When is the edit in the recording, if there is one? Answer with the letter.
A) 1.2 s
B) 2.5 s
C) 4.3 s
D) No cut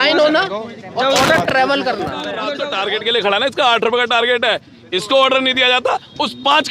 B